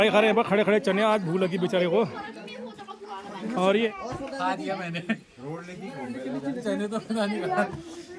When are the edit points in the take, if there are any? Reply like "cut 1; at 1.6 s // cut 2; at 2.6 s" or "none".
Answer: none